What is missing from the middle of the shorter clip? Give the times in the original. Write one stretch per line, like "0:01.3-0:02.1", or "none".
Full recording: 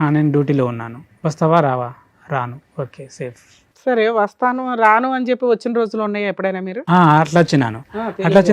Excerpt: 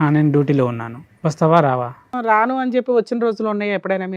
0:02.1-0:04.7

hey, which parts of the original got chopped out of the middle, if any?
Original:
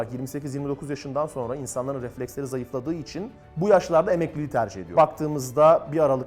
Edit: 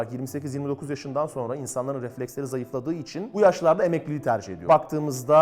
0:03.4-0:03.6

